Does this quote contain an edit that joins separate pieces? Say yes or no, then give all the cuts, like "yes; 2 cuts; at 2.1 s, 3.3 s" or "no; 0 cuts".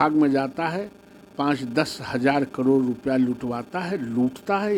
no; 0 cuts